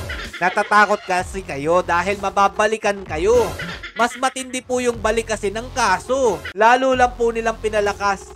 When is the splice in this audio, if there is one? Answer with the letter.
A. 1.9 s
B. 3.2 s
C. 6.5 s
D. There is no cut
C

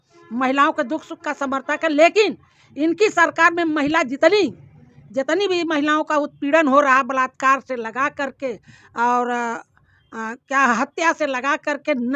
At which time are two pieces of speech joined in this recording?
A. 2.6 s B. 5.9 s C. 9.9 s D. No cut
D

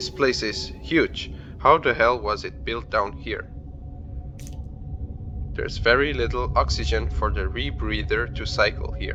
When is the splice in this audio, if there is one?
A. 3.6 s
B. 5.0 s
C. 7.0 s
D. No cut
D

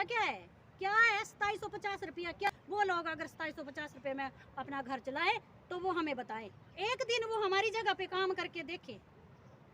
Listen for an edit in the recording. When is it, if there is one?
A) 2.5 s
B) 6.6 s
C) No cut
A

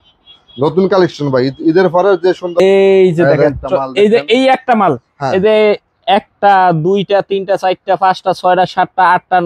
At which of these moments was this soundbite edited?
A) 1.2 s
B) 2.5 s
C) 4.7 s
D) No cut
B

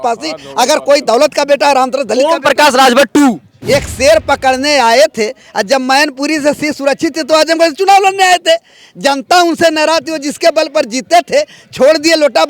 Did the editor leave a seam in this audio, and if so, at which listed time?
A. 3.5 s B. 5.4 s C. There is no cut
A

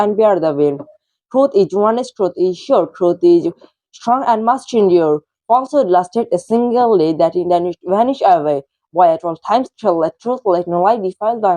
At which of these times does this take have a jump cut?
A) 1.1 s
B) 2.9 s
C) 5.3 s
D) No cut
D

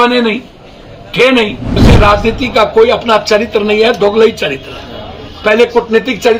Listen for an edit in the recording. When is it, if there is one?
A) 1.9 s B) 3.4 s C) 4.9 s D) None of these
A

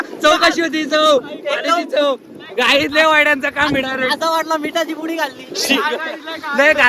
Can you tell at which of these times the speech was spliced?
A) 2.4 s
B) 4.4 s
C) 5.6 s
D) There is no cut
C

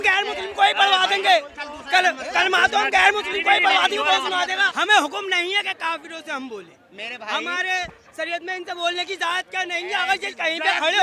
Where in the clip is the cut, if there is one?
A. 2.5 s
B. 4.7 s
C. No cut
B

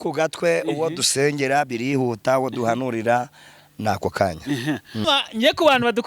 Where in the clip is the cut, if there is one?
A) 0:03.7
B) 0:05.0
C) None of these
B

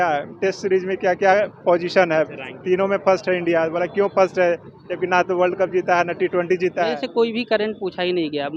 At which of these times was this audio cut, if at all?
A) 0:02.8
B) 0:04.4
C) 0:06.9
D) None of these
C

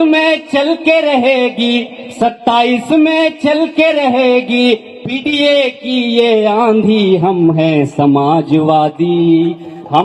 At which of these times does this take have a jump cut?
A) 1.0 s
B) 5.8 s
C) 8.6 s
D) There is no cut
D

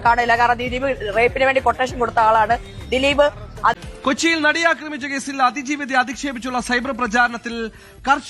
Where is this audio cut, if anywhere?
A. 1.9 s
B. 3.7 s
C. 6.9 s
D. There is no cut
B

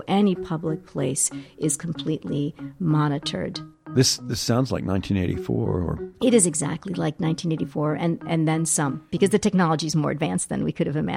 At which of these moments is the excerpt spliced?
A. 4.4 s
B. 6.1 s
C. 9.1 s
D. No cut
C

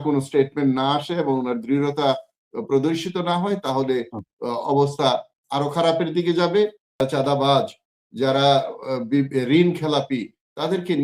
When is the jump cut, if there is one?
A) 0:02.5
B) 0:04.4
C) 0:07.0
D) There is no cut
C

